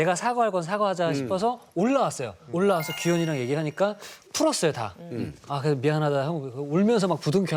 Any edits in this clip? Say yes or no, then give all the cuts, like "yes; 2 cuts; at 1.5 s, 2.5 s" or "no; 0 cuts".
no; 0 cuts